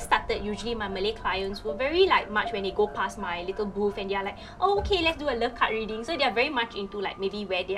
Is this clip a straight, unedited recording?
yes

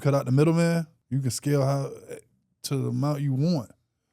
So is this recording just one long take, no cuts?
no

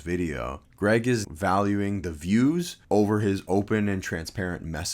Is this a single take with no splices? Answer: no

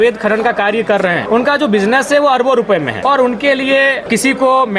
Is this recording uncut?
no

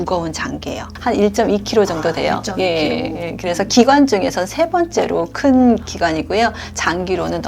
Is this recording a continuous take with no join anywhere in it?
no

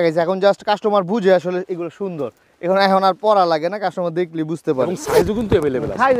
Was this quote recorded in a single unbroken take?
yes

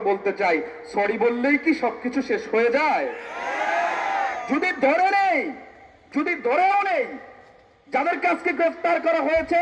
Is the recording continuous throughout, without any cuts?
yes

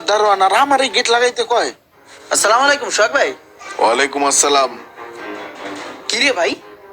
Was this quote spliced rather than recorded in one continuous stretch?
yes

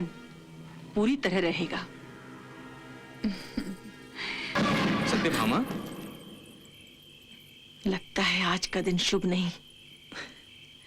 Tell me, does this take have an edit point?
yes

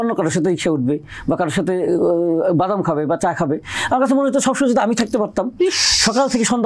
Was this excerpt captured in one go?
yes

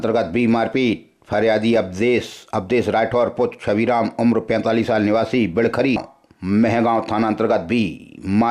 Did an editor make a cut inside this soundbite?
yes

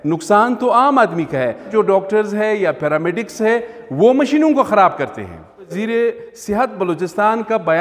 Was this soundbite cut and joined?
yes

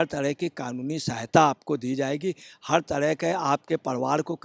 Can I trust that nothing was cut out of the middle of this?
yes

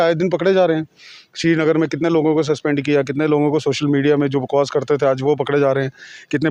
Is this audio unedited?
yes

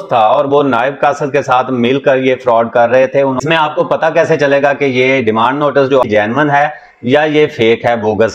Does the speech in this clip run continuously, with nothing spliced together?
no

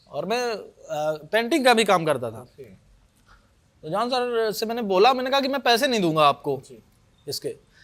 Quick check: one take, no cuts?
yes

